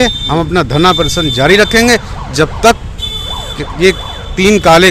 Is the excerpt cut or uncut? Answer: uncut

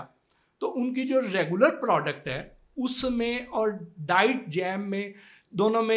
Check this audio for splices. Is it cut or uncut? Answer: uncut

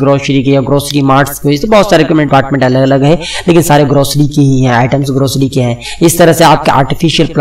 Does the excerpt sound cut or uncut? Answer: cut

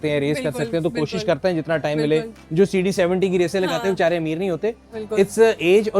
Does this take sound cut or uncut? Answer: cut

